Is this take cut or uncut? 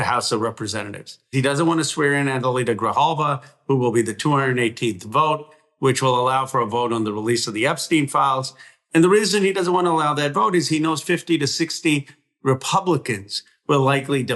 cut